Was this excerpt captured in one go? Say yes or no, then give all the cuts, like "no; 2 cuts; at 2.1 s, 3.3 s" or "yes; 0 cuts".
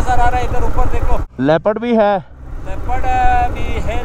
no; 1 cut; at 1.2 s